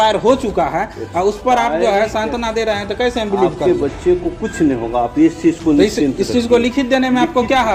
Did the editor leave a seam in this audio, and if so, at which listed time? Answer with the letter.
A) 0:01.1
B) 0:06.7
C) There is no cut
C